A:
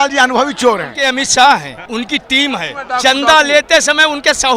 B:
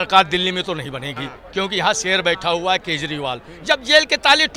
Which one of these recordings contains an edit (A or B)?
A